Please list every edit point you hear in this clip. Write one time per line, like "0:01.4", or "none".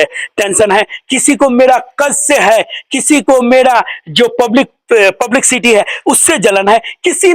none